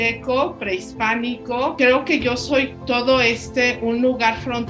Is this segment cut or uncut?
cut